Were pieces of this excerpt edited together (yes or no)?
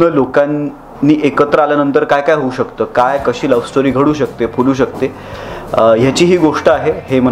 no